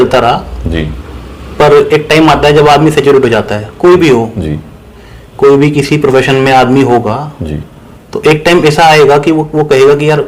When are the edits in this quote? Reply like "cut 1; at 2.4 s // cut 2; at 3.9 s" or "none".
none